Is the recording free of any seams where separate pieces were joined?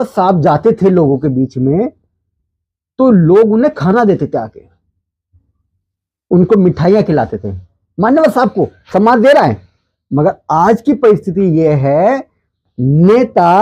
yes; 0 cuts

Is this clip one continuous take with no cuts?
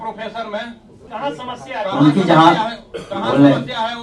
no; 1 cut; at 1.1 s

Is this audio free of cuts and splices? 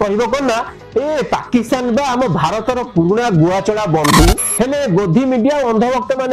no; 1 cut; at 4.6 s

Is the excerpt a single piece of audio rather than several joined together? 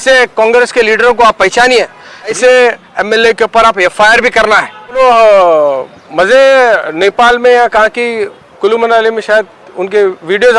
no; 2 cuts; at 2.3 s, 5.0 s

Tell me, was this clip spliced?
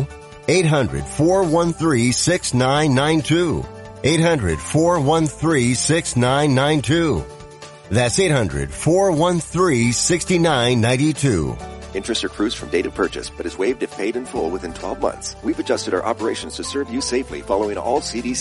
yes; 1 cut; at 15.3 s

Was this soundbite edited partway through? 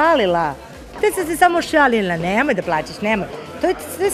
no; 0 cuts

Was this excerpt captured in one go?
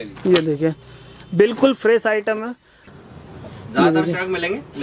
no; 1 cut; at 2.9 s

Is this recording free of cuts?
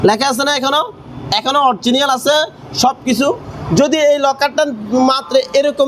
yes; 0 cuts

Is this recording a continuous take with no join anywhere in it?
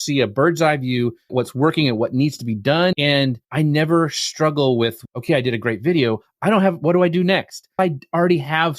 no; 4 cuts; at 1.3 s, 2.9 s, 5.1 s, 7.8 s

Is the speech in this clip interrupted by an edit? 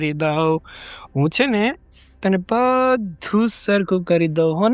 no; 0 cuts

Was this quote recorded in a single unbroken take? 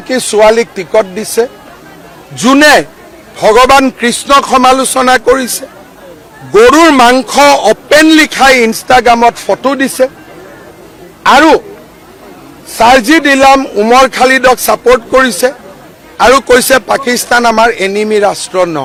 yes; 0 cuts

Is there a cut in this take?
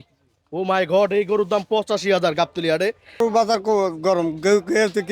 yes; 1 cut; at 3.2 s

